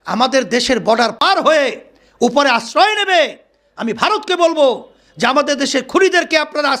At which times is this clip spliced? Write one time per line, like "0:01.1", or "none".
0:01.2